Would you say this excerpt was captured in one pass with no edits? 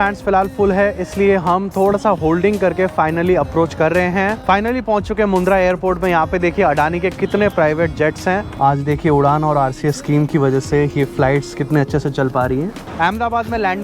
no; 3 cuts; at 4.4 s, 8.5 s, 12.8 s

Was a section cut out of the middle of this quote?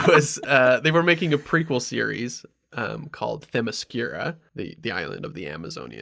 yes; 1 cut; at 4.4 s

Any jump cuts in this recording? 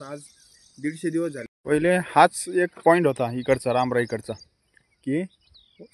yes; 1 cut; at 1.5 s

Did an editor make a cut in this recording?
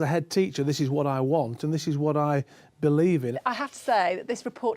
yes; 1 cut; at 3.4 s

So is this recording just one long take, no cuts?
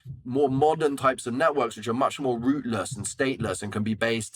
yes; 0 cuts

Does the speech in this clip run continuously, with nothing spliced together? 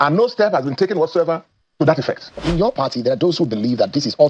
no; 1 cut; at 2.4 s

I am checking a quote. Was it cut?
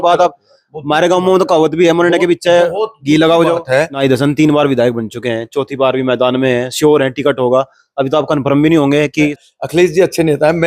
yes; 2 cuts; at 3.9 s, 9.5 s

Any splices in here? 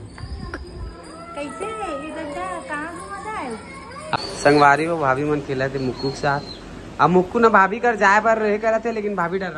yes; 1 cut; at 4.2 s

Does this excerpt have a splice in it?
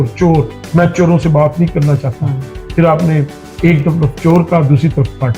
no; 0 cuts

